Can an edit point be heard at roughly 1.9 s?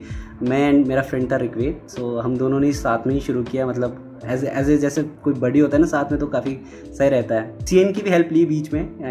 no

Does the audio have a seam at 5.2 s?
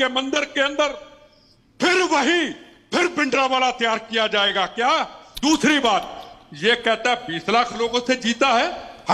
yes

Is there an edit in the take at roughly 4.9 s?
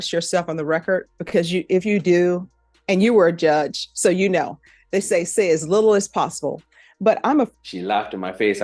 no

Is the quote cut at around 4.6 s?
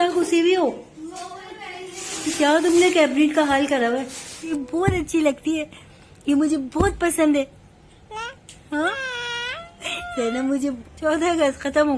yes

